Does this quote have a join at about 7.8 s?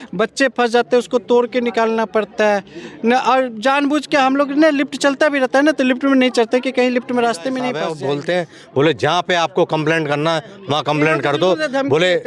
yes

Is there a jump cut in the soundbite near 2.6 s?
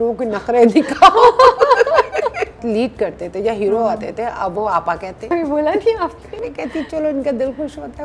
yes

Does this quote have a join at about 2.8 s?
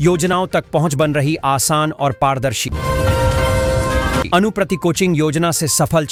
no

